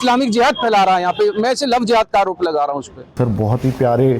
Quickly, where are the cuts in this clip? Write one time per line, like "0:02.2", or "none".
0:03.1